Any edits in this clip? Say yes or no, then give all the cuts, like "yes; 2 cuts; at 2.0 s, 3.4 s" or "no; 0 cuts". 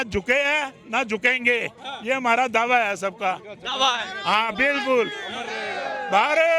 no; 0 cuts